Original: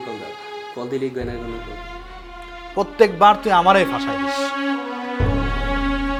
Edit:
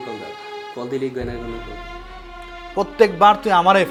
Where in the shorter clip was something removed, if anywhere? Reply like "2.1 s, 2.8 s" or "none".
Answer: none